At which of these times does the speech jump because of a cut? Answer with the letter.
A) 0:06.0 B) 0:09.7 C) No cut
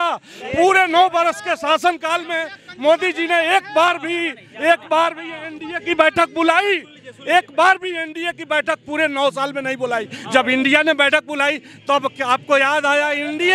C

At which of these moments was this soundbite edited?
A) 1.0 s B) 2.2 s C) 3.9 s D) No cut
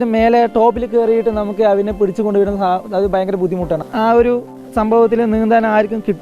C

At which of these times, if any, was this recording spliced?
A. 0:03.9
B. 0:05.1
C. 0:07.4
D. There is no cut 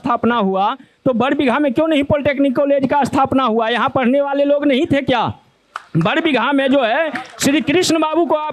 D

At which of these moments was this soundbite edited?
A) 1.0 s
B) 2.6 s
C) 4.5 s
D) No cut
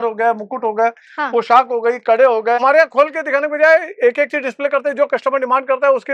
B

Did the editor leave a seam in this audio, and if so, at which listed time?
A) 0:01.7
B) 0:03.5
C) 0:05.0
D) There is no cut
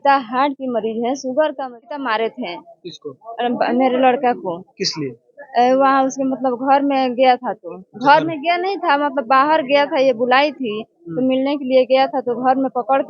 A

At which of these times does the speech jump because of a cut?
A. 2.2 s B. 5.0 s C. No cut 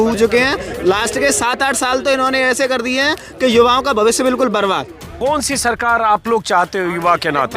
B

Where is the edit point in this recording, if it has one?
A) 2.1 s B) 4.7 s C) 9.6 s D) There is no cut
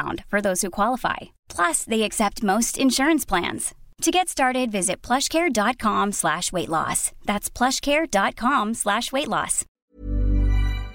C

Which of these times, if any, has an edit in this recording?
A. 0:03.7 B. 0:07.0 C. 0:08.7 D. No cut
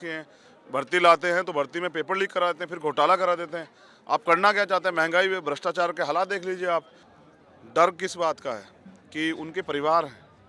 B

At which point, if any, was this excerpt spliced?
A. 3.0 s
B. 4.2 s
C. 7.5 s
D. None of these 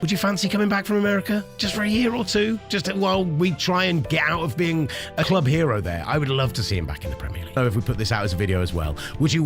C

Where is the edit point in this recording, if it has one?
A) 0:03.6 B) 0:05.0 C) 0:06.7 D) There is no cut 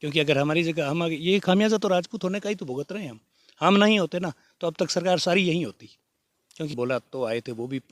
C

